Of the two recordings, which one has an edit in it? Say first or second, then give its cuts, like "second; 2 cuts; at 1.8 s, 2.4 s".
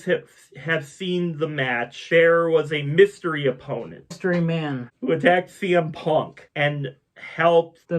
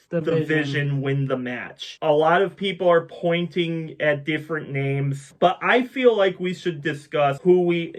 first; 1 cut; at 4.9 s